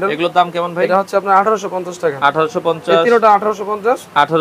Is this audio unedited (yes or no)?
yes